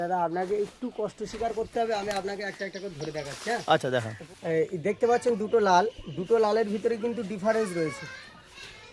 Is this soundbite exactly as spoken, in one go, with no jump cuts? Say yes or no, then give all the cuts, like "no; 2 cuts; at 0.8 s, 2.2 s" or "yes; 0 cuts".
no; 1 cut; at 4.2 s